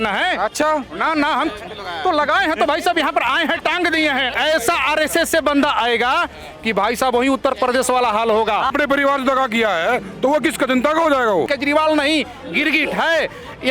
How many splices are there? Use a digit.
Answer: 3